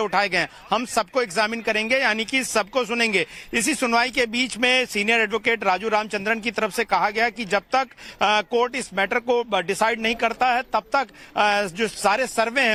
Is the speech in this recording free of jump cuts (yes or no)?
yes